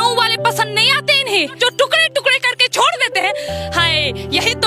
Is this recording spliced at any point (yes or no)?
yes